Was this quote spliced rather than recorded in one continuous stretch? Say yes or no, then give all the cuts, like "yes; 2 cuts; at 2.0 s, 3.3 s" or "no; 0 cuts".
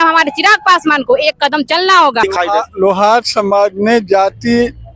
yes; 1 cut; at 2.2 s